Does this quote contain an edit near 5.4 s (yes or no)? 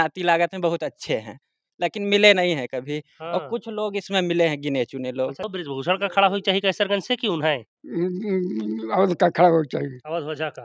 yes